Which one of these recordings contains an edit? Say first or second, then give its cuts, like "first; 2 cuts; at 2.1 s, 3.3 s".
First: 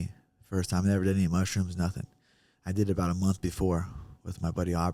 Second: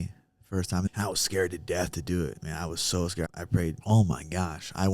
second; 2 cuts; at 0.9 s, 3.3 s